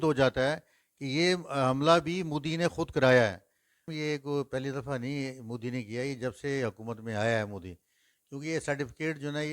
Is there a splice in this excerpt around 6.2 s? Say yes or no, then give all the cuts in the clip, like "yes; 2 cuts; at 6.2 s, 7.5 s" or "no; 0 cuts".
no; 1 cut; at 3.9 s